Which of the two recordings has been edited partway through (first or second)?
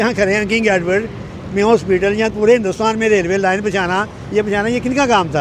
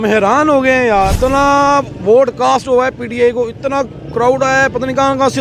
second